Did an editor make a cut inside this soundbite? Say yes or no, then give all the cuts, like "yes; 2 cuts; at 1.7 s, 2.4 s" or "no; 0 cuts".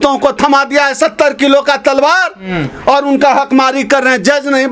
no; 0 cuts